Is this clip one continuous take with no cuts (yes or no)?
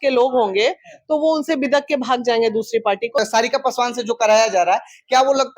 no